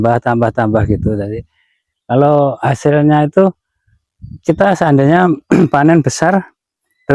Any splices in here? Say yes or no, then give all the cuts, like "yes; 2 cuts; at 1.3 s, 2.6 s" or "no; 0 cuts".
no; 0 cuts